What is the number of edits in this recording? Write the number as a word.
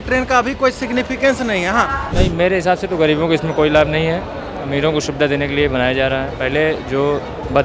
one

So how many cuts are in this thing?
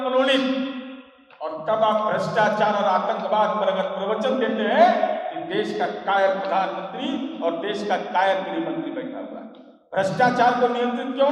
zero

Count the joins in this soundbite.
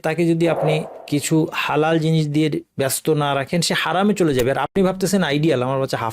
two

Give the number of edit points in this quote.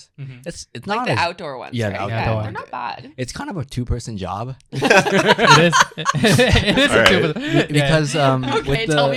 zero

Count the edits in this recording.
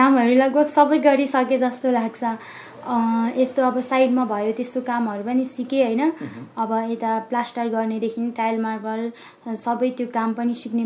zero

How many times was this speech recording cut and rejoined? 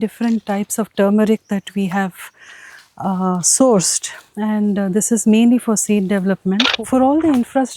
one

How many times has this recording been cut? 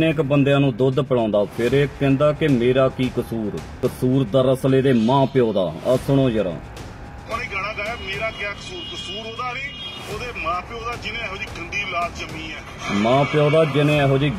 one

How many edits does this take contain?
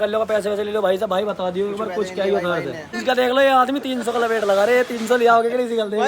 one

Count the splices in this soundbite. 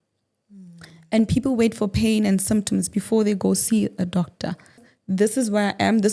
one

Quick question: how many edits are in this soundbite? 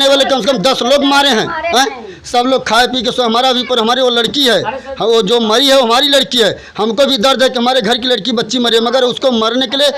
zero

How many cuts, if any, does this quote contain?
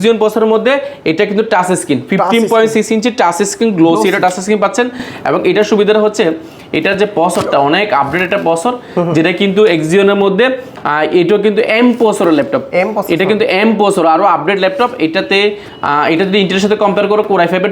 zero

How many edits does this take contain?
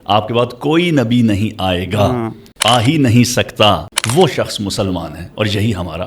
two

